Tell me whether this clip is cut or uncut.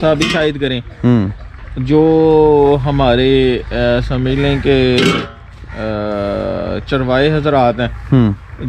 uncut